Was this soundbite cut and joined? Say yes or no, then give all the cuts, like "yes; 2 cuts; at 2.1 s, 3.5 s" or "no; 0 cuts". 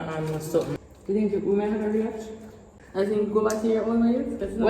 yes; 2 cuts; at 0.8 s, 3.2 s